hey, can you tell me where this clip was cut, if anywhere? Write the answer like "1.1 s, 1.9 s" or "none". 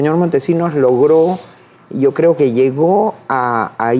none